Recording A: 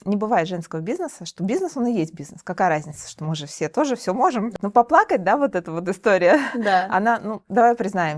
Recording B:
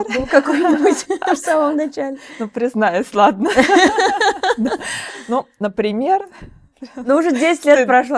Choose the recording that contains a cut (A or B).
A